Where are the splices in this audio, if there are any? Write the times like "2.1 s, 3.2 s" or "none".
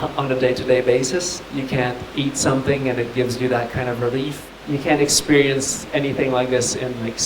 1.4 s, 4.5 s